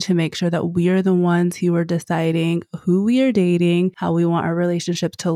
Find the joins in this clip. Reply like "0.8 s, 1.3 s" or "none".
4.0 s